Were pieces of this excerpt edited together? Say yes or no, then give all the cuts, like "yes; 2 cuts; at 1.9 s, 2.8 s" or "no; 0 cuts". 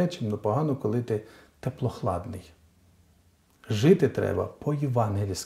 no; 0 cuts